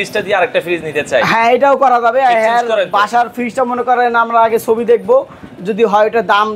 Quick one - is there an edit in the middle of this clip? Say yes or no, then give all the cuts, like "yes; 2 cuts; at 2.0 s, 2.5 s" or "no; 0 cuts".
no; 0 cuts